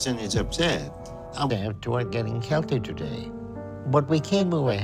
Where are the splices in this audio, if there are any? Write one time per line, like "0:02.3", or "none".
0:01.5